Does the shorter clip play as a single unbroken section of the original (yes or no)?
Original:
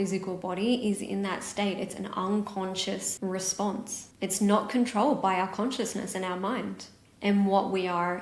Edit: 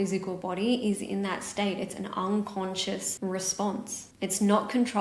yes